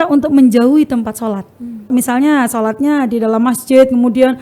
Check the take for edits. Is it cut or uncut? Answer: cut